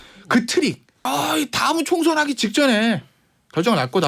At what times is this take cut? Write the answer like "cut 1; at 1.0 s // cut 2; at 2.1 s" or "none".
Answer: cut 1; at 0.9 s